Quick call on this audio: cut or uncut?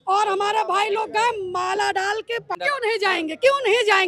cut